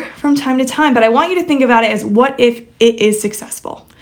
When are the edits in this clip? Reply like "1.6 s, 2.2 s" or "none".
none